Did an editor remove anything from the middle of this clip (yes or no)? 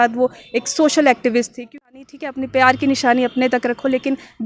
yes